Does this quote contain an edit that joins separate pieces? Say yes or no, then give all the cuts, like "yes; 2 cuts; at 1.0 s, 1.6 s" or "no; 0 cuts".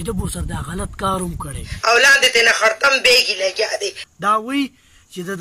yes; 1 cut; at 1.7 s